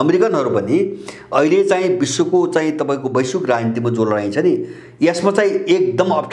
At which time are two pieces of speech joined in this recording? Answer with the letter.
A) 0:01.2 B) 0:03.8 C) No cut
C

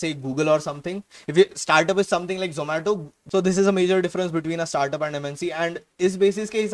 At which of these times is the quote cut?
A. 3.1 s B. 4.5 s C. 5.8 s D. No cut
A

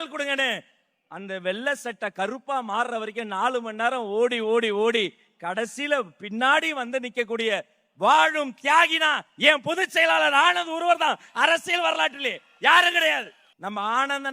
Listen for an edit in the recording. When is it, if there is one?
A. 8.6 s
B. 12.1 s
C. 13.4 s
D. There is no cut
C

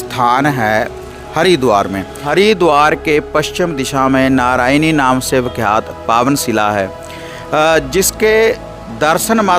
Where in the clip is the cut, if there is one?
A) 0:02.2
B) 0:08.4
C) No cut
A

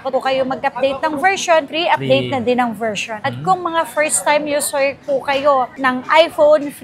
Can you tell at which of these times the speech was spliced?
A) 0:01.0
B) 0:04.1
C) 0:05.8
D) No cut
D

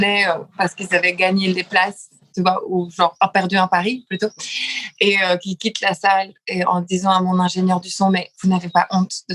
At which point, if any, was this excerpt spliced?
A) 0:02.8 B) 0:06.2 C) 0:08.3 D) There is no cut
D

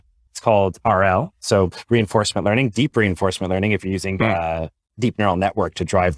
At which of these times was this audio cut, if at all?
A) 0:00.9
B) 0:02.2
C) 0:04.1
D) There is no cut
D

